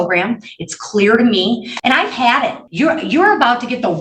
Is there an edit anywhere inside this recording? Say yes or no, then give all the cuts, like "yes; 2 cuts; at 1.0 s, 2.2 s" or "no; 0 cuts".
yes; 2 cuts; at 1.7 s, 2.6 s